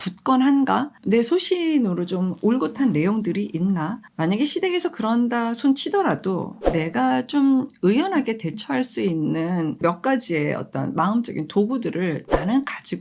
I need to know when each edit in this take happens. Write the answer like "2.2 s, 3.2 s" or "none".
0.9 s, 4.0 s, 6.6 s, 9.8 s